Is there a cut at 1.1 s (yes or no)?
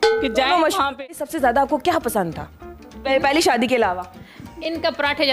yes